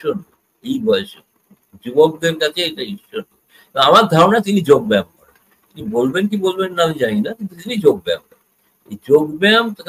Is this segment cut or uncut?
uncut